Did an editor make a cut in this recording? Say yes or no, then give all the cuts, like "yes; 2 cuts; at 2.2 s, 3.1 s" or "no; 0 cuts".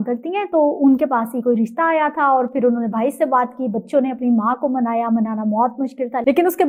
no; 0 cuts